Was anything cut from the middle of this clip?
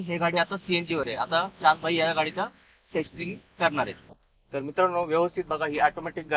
no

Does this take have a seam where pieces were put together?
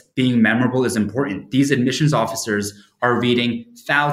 no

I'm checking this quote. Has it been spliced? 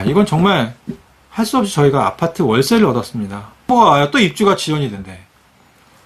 yes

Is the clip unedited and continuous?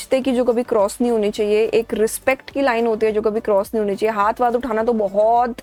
yes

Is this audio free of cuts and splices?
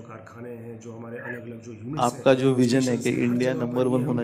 no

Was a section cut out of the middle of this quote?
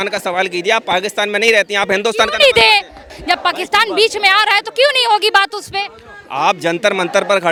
no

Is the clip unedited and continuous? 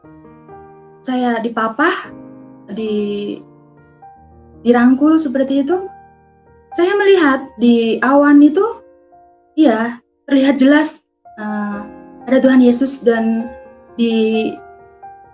no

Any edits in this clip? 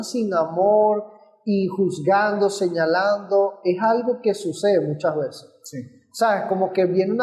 no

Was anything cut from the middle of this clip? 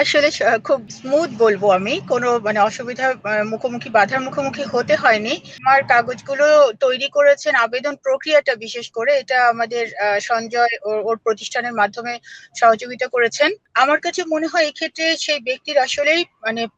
yes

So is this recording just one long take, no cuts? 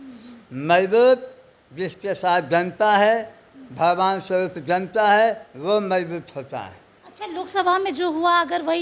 yes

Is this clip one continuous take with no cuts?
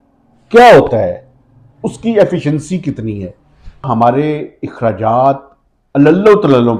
no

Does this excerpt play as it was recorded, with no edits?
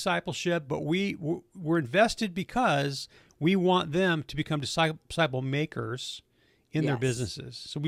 yes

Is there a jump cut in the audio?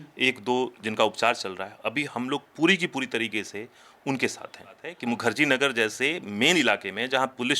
yes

